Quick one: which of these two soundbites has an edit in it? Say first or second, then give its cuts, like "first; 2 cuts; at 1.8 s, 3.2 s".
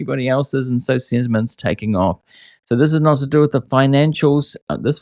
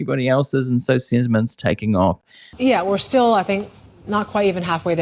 second; 1 cut; at 2.4 s